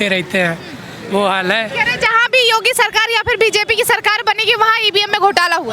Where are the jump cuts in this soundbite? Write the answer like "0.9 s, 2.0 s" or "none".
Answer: none